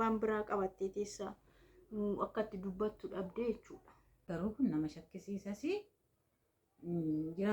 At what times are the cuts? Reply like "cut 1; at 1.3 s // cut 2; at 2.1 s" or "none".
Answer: cut 1; at 4.3 s